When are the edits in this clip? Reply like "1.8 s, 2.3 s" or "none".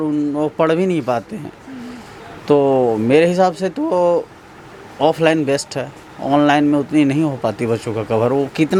none